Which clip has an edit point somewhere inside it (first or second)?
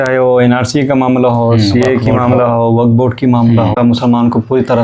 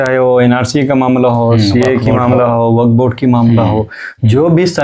first